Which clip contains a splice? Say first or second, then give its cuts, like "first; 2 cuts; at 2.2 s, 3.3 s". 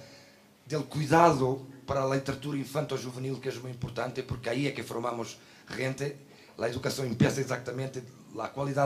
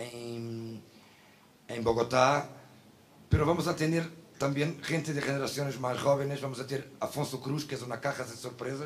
second; 1 cut; at 3.9 s